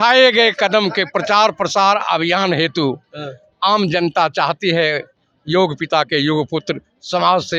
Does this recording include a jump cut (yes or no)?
no